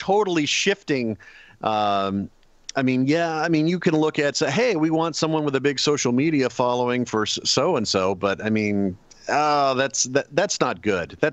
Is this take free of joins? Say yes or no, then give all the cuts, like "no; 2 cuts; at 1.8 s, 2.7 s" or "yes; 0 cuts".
yes; 0 cuts